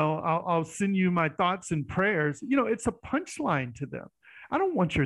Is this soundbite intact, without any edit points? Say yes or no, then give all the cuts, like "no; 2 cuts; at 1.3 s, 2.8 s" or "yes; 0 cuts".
yes; 0 cuts